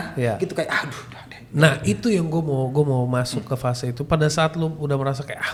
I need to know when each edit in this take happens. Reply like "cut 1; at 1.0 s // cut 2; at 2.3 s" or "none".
none